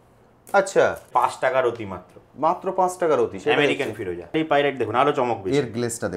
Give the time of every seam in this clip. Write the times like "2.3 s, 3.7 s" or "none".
1.1 s, 4.3 s